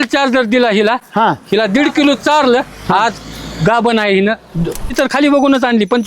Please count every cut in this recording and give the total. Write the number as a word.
one